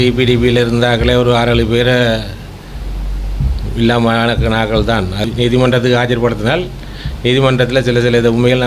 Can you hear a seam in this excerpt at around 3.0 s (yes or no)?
no